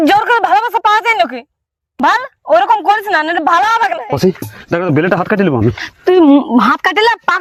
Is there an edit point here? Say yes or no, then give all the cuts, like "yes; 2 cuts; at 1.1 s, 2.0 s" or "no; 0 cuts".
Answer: no; 0 cuts